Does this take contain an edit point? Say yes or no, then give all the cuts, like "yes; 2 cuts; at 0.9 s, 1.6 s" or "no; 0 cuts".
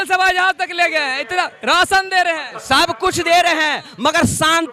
no; 0 cuts